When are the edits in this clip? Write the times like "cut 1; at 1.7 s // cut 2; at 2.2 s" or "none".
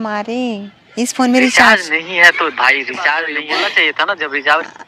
cut 1; at 3.1 s